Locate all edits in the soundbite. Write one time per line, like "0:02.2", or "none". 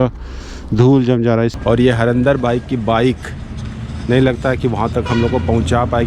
0:01.5